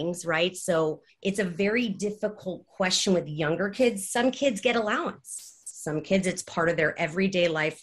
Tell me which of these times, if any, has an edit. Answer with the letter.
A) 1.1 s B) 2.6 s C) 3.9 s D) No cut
A